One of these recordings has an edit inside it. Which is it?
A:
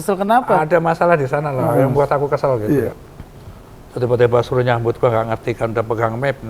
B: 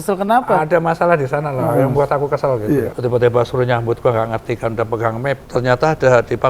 B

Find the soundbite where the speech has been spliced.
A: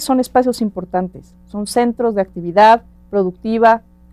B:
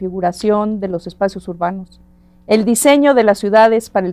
A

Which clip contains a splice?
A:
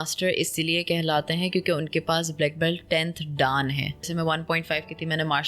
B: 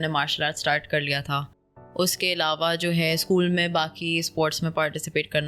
A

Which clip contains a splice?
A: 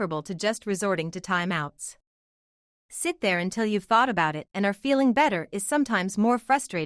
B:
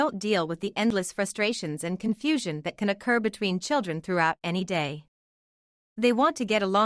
B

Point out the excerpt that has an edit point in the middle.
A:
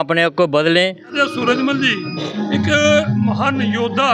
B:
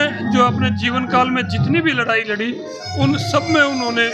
A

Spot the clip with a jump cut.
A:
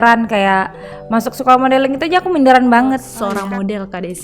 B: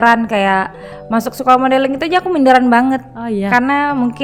A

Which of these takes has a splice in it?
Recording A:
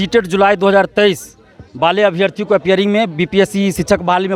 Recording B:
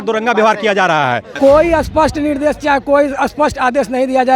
B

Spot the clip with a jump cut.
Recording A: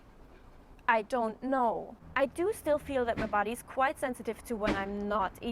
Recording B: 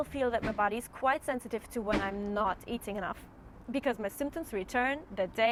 A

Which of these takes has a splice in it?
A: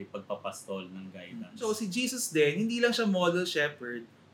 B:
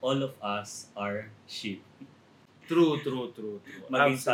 A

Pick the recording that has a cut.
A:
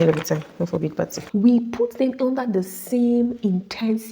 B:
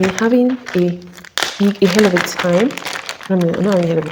A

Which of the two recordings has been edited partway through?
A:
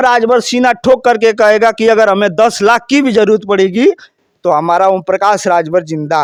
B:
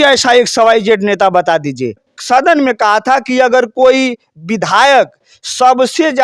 B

